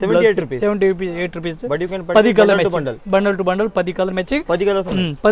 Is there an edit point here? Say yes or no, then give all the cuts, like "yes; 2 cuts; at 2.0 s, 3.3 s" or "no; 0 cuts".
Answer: no; 0 cuts